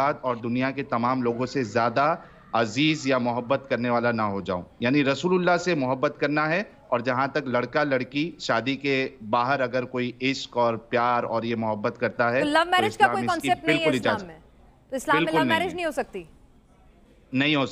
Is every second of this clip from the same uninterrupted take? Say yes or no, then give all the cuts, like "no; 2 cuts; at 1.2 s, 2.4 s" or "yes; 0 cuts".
yes; 0 cuts